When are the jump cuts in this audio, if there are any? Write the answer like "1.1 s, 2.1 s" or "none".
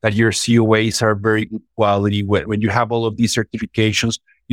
none